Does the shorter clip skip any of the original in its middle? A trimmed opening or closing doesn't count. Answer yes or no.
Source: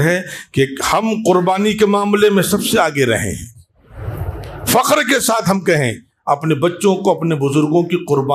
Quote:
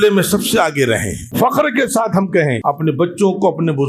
yes